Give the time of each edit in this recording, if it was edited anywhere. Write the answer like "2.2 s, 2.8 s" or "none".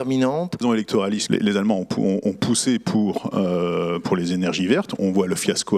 0.9 s

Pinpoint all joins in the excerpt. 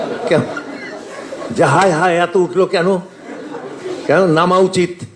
none

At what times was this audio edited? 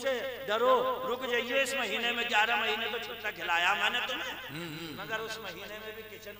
none

